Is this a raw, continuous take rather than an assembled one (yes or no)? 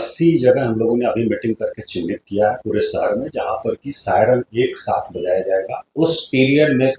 no